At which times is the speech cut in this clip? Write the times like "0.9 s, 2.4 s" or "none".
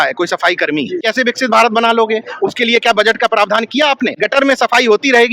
1.0 s, 4.1 s